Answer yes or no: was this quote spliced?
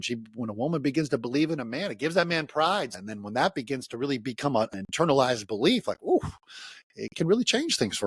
yes